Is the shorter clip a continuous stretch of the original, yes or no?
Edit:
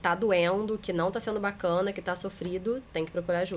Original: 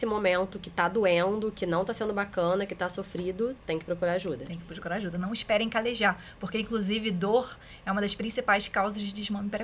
yes